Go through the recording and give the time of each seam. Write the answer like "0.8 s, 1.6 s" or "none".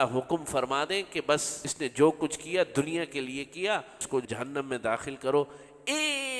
1.6 s, 4.0 s